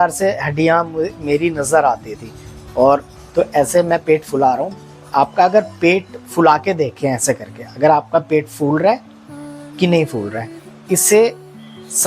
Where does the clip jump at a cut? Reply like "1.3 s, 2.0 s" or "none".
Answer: 3.1 s